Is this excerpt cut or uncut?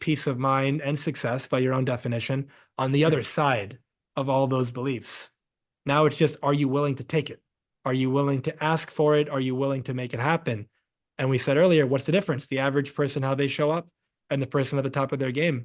uncut